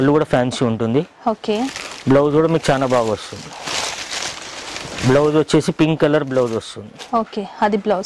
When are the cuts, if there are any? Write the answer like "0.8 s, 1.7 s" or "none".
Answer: none